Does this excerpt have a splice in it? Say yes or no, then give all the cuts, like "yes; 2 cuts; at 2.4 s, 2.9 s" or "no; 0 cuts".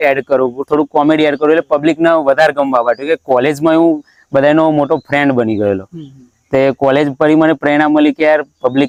no; 0 cuts